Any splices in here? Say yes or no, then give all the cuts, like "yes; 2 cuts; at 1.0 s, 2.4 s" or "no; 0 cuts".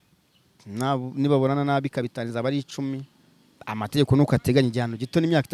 no; 0 cuts